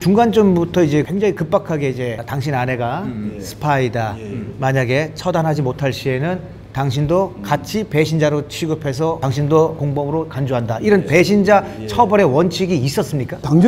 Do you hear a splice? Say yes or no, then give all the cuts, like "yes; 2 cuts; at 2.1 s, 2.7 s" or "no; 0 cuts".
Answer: no; 0 cuts